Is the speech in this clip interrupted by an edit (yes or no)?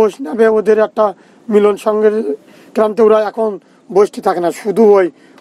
no